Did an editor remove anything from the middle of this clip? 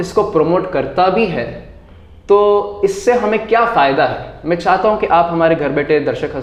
no; 0 cuts

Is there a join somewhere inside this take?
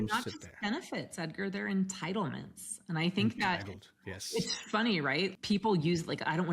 yes; 1 cut; at 5.3 s

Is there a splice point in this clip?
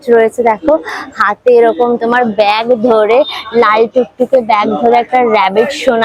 no; 0 cuts

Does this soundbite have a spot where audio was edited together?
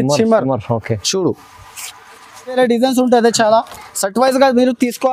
yes; 1 cut; at 2.6 s

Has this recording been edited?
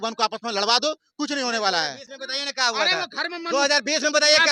no; 0 cuts

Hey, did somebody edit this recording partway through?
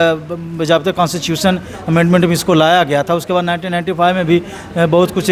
no; 0 cuts

